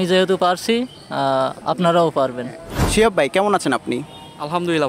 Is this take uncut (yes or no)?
yes